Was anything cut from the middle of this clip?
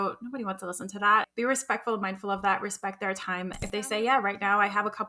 yes; 2 cuts; at 1.3 s, 3.6 s

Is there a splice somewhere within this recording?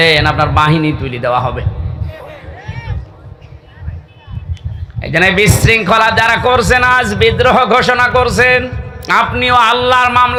no; 0 cuts

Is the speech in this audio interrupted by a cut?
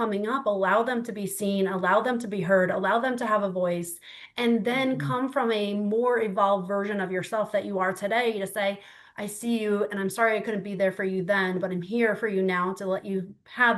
no; 0 cuts

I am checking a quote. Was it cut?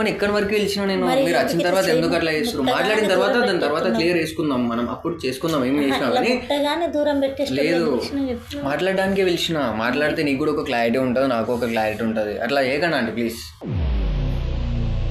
no; 0 cuts

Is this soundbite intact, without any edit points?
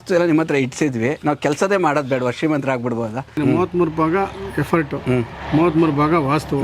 no; 1 cut; at 3.4 s

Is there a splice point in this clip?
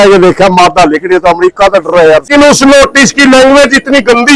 yes; 1 cut; at 2.3 s

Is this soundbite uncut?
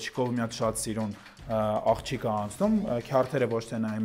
yes; 0 cuts

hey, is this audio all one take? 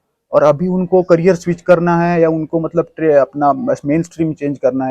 yes; 0 cuts

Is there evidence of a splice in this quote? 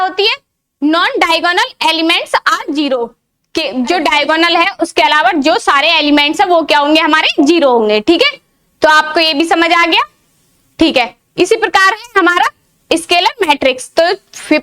yes; 1 cut; at 3.1 s

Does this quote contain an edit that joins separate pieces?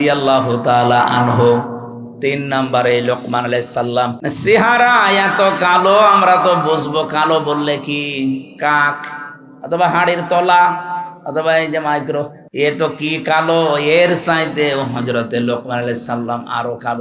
yes; 2 cuts; at 4.2 s, 12.4 s

